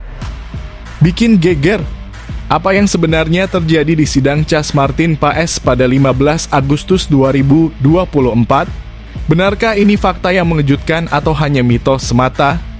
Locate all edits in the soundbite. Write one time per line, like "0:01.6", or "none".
0:01.0